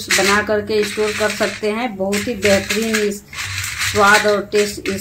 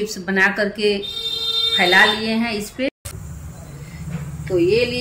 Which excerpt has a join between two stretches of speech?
second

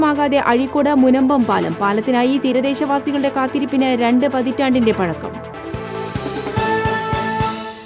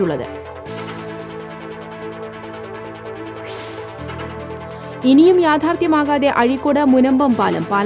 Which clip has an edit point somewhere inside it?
first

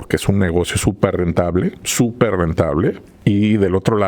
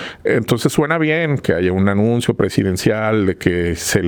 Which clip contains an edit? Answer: first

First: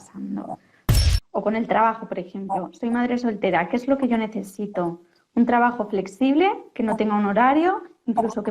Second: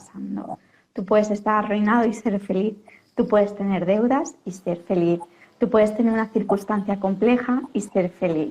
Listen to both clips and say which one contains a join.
first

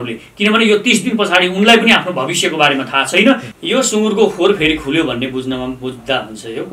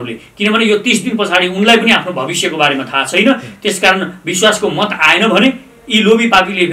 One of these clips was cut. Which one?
first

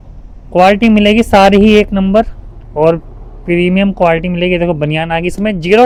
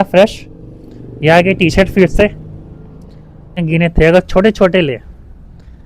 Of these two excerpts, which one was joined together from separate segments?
second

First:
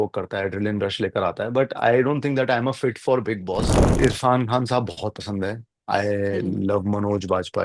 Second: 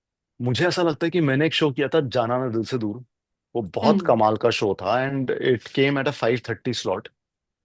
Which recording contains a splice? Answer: first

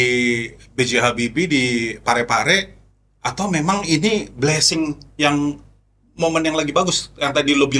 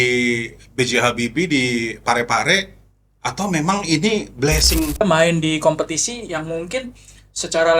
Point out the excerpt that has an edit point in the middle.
second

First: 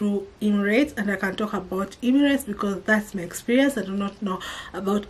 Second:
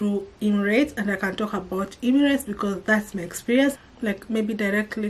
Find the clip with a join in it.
second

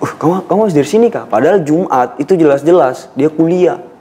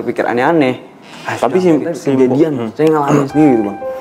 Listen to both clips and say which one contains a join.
second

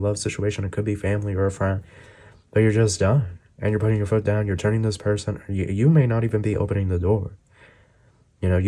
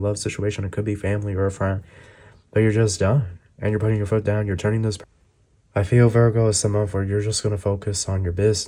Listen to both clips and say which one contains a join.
second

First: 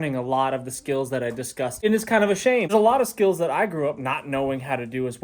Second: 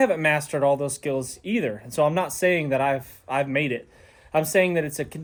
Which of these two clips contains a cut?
first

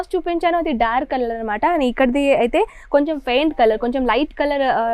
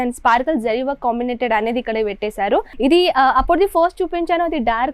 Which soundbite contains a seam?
second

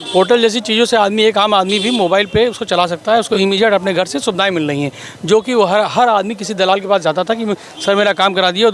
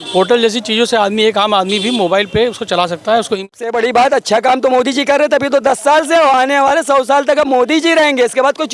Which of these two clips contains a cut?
second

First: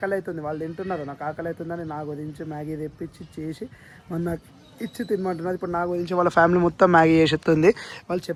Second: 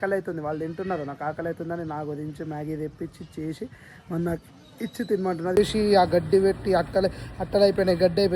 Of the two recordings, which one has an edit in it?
second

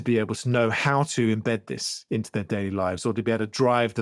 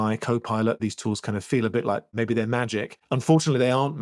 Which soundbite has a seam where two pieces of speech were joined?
second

